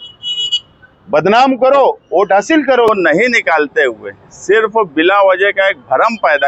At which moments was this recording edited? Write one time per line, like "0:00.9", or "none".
0:02.9